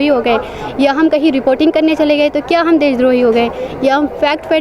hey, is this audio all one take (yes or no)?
yes